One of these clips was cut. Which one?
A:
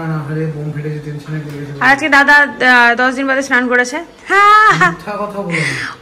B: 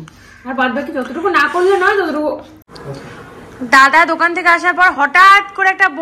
B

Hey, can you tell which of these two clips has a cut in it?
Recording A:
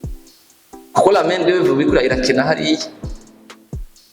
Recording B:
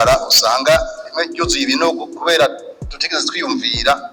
A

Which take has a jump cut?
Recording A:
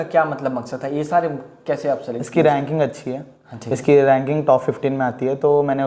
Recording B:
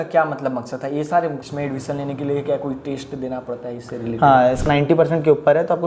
B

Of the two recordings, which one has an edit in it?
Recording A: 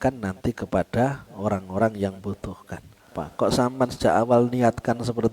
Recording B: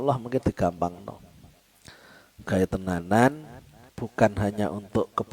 A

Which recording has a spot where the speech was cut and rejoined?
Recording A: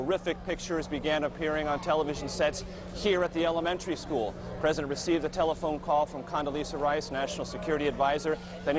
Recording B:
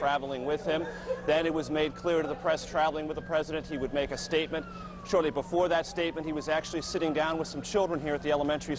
B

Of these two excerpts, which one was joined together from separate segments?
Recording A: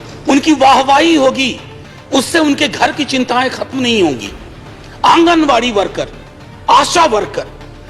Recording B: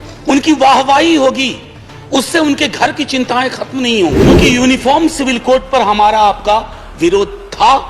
B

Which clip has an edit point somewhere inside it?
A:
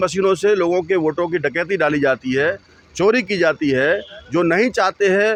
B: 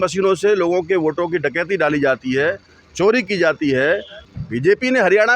B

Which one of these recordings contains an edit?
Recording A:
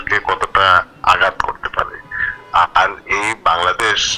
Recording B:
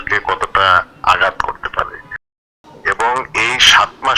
B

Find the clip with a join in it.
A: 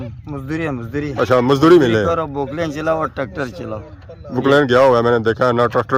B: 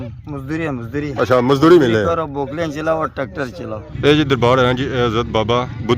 B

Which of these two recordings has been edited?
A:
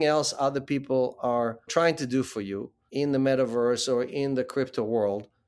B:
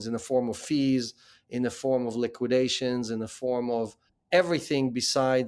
A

